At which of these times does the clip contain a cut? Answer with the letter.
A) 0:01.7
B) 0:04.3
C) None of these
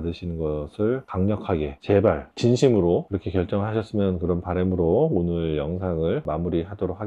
C